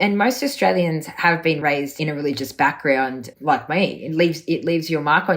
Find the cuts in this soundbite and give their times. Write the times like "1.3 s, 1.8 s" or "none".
1.6 s, 3.3 s